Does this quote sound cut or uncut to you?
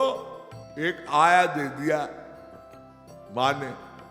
uncut